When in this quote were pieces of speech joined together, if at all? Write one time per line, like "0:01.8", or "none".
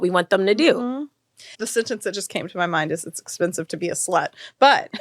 0:01.6